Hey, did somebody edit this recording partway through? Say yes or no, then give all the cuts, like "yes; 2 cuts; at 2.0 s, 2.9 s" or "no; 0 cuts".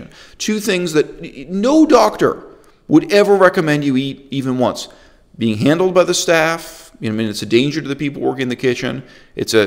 no; 0 cuts